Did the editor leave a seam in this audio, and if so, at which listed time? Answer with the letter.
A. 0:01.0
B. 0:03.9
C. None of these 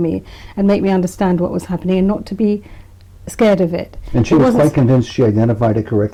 C